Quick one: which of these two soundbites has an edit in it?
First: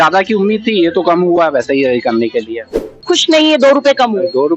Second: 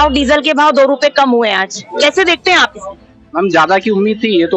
first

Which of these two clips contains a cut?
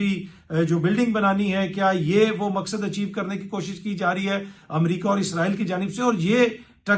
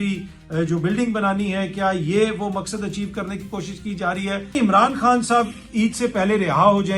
second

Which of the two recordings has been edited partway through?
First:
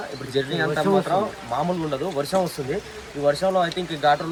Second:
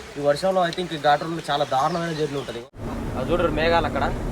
second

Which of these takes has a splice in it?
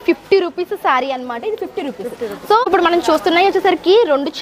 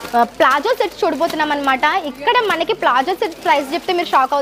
first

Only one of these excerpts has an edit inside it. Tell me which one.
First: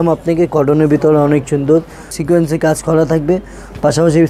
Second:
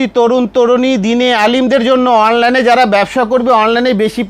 first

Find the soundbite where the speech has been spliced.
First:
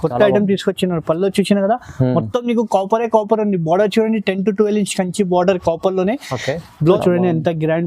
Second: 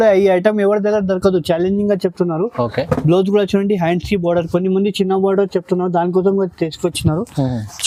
first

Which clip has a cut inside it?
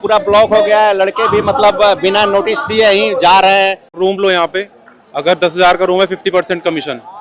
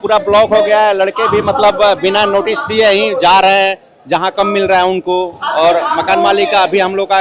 first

